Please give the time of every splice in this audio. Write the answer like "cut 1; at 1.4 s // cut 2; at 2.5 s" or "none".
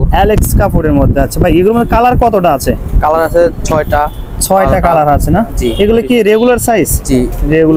none

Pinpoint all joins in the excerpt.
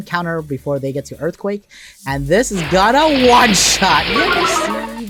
none

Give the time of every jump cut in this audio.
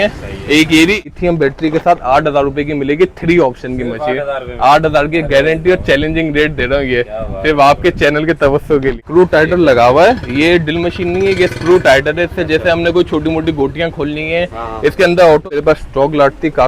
cut 1; at 1.1 s // cut 2; at 9.0 s // cut 3; at 15.5 s

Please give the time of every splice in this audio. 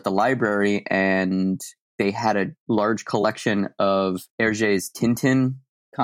cut 1; at 1.8 s // cut 2; at 2.6 s // cut 3; at 4.3 s

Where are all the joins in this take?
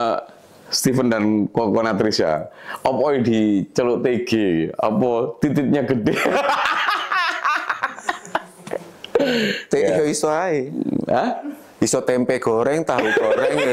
none

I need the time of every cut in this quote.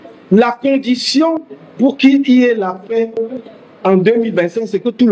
none

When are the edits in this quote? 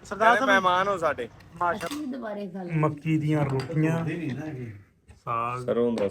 cut 1; at 1.8 s

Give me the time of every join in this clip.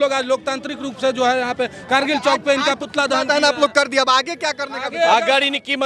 none

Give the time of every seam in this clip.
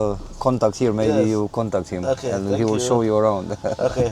none

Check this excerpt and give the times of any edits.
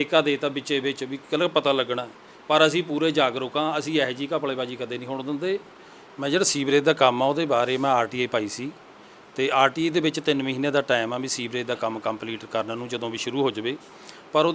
cut 1; at 5.6 s

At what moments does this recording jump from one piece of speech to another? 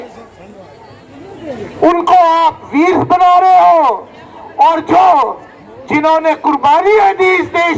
none

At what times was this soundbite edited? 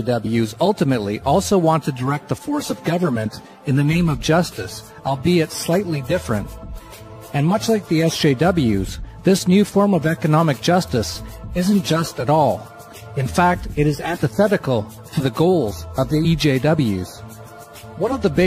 none

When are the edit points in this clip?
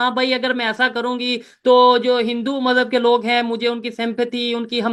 none

